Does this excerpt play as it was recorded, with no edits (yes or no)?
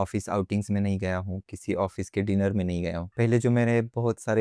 no